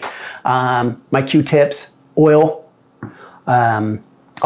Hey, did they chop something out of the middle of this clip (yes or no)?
no